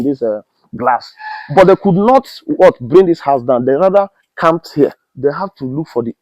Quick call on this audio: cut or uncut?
cut